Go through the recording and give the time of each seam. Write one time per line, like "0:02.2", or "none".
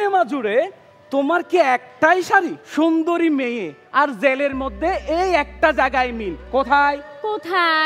0:02.6